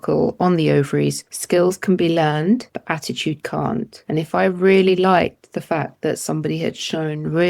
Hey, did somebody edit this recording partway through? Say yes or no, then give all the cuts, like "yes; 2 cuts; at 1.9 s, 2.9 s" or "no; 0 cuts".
yes; 3 cuts; at 1.3 s, 2.7 s, 4.0 s